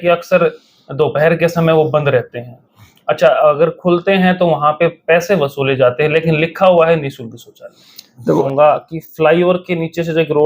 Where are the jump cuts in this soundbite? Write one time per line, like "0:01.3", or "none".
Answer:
0:08.4